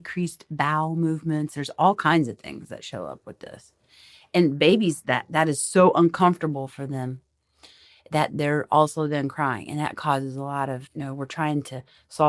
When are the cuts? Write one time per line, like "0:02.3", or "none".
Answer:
0:10.9